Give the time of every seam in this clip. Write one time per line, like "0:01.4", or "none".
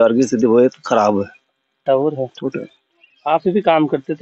0:01.8